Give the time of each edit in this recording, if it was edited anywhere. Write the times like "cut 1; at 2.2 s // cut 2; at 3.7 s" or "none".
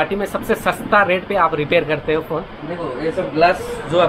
none